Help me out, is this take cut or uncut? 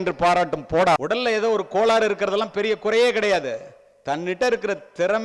cut